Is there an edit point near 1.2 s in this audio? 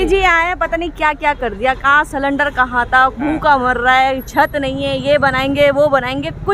no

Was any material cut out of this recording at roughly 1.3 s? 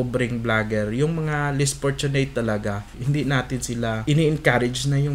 no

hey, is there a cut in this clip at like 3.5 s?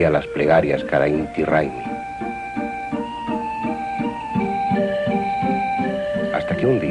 no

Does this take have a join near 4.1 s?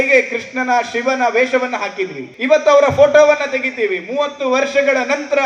no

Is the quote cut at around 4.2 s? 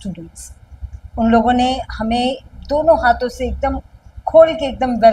no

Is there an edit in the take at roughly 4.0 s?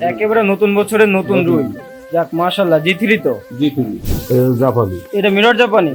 yes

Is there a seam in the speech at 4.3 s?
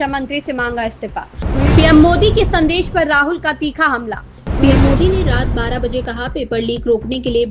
yes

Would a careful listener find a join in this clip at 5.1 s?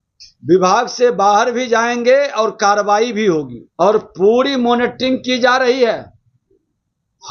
no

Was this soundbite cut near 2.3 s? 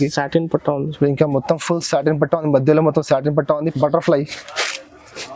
no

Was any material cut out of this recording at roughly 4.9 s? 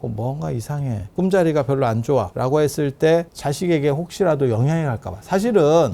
no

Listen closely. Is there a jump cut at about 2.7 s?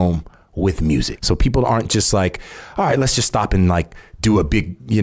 no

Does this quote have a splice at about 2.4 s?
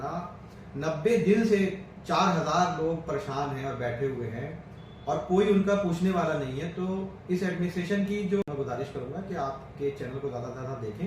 no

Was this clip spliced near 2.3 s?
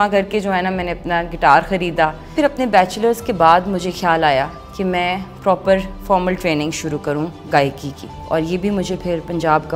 yes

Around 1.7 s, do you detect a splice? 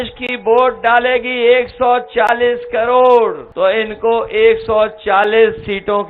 no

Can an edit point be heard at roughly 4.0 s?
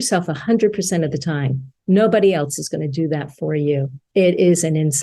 yes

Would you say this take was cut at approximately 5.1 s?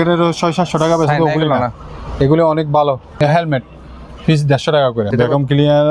yes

